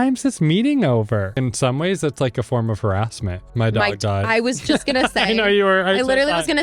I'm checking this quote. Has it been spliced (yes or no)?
yes